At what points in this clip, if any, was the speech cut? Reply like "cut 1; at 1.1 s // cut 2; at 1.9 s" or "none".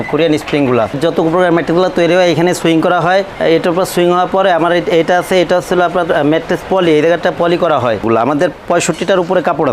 cut 1; at 1.0 s // cut 2; at 8.0 s